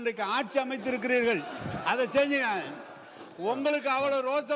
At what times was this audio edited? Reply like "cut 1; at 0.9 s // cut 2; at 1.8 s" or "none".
none